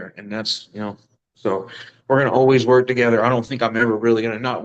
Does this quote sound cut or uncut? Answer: uncut